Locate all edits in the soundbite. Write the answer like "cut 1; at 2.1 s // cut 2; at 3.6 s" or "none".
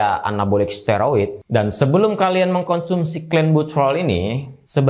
cut 1; at 1.4 s